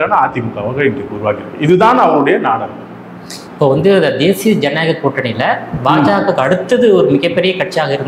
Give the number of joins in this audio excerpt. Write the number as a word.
zero